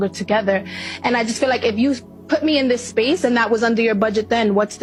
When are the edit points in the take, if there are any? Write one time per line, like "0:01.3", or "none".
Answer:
none

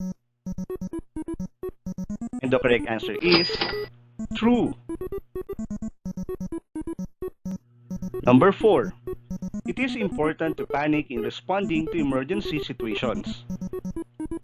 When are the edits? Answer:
none

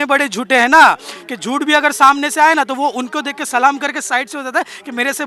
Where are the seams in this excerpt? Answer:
none

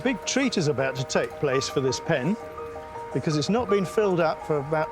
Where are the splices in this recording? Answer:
none

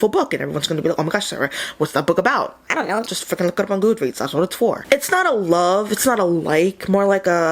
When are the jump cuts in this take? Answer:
0:04.8

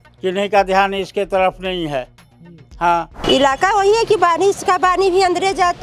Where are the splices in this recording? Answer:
0:03.2

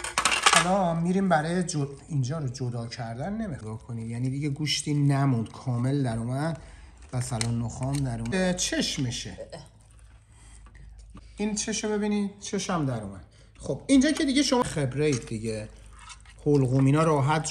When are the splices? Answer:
0:03.6
0:08.3
0:11.2
0:14.6

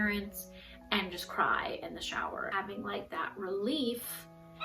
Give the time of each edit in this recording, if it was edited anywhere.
0:02.5

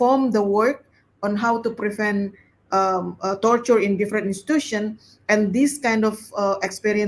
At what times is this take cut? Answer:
none

